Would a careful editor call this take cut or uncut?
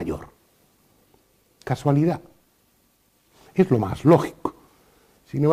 cut